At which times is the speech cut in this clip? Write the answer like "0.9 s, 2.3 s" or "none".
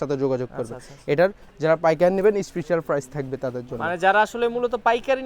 1.5 s